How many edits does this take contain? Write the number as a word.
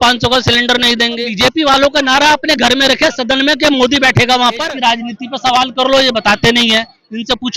two